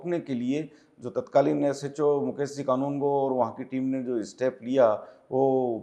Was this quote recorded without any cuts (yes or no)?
yes